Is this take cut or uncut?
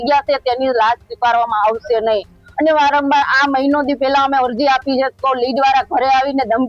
uncut